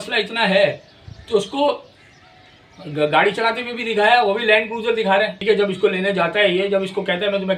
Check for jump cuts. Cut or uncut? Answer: uncut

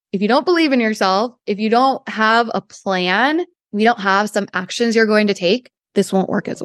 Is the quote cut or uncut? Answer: cut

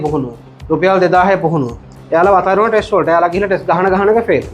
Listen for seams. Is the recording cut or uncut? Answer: cut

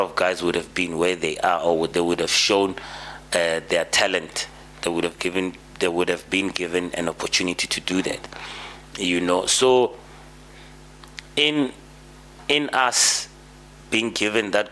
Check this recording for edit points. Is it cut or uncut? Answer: uncut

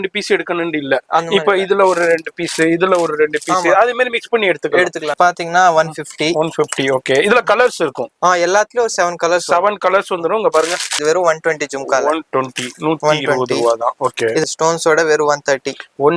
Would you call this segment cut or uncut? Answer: cut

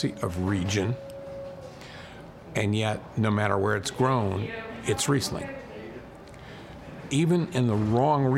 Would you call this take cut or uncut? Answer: uncut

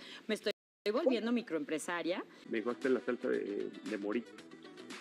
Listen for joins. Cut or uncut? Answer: cut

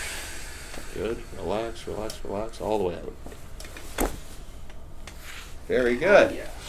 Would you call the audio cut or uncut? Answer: uncut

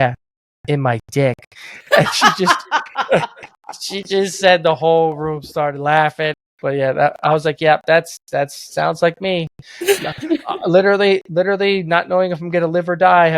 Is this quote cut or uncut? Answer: cut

